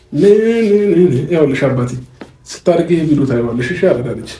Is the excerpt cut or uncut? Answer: uncut